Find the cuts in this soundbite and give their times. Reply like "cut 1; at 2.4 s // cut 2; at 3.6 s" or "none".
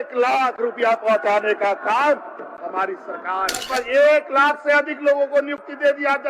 cut 1; at 3.6 s